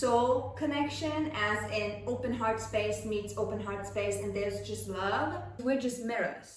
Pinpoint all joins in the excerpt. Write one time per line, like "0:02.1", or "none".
0:05.6